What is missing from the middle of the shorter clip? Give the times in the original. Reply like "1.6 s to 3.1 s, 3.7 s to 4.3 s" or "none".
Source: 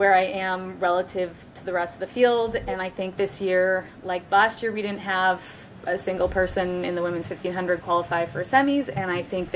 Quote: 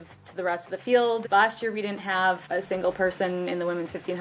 2.5 s to 4.2 s, 5.4 s to 5.8 s